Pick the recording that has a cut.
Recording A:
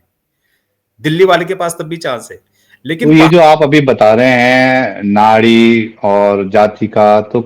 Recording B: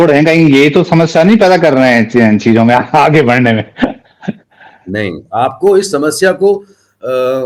A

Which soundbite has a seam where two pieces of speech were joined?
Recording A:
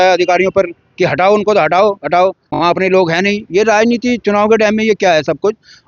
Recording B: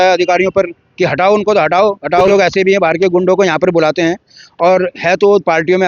B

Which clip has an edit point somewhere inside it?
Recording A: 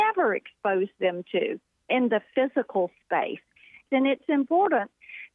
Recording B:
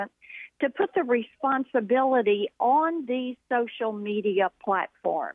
A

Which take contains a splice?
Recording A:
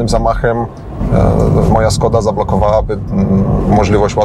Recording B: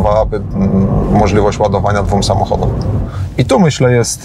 B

